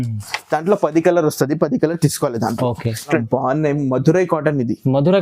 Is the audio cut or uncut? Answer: cut